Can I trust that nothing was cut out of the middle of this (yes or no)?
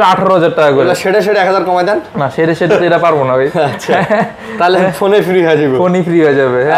yes